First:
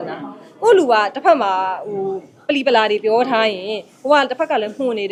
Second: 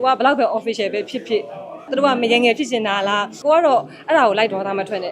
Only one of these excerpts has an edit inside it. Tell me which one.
second; 2 cuts; at 1.9 s, 3.3 s

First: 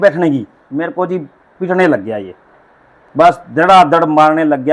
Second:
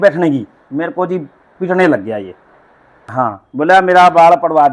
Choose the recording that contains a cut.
second; 1 cut; at 3.0 s

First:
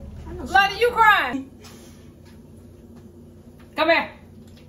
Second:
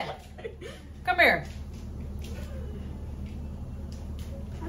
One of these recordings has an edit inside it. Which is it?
first; 1 cut; at 1.3 s

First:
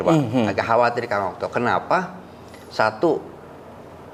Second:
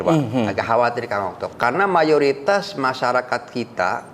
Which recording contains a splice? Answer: second; 1 cut; at 1.4 s

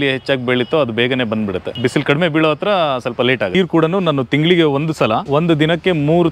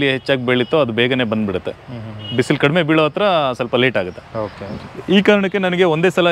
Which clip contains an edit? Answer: first; 3 cuts; at 1.7 s, 3.5 s, 5.2 s

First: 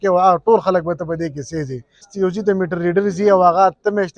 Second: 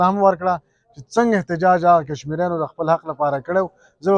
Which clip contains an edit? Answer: first; 1 cut; at 2.1 s

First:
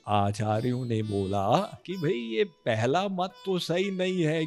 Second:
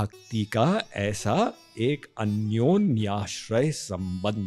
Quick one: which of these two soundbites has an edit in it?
first; 1 cut; at 1.8 s

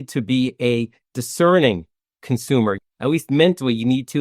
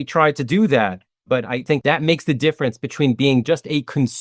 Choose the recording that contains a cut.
first; 1 cut; at 2.9 s

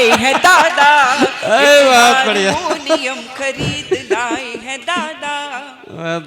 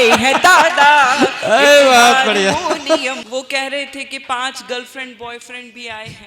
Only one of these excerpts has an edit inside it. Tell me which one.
second; 1 cut; at 3.2 s

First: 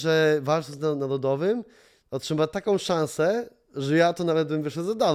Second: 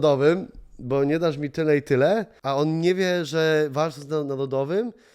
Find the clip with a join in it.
second; 1 cut; at 2.3 s

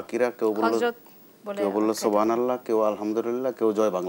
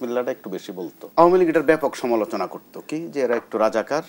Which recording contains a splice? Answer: second; 1 cut; at 1.0 s

